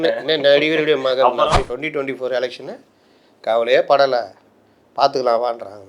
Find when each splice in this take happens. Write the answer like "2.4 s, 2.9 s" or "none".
1.7 s